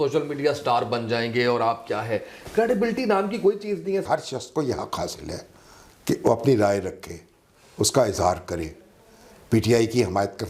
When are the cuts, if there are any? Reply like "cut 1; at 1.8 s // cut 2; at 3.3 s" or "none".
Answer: cut 1; at 4.1 s